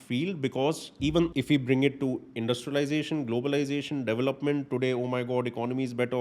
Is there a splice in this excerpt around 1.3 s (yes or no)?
yes